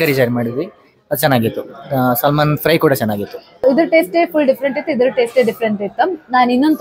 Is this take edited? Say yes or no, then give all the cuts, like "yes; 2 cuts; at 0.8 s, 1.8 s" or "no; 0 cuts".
yes; 1 cut; at 3.6 s